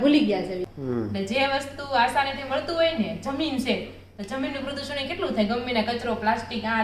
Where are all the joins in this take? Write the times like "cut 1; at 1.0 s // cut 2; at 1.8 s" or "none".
cut 1; at 1.0 s

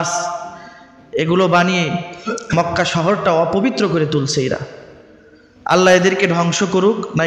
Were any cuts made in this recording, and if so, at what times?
none

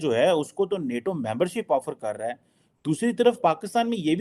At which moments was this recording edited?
none

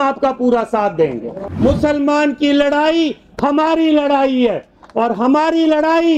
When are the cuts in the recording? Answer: cut 1; at 1.4 s

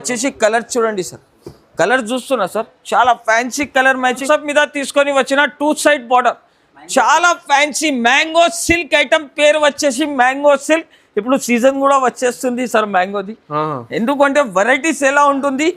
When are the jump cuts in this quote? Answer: cut 1; at 4.2 s

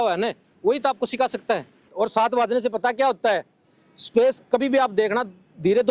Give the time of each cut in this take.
cut 1; at 1.9 s

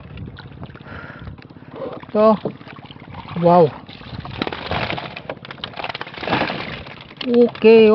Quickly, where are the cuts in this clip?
cut 1; at 4.2 s

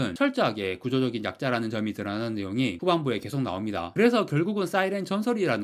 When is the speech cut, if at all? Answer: cut 1; at 3.9 s

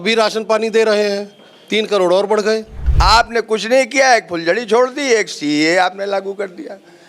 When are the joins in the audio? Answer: cut 1; at 2.8 s

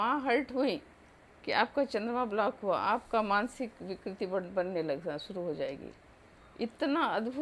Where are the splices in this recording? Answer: none

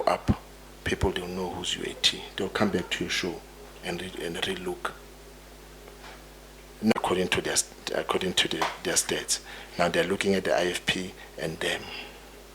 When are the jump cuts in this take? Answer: cut 1; at 6.9 s

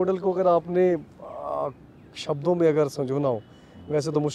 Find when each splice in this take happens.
none

